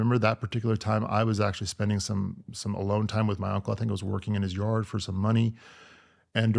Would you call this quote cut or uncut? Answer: uncut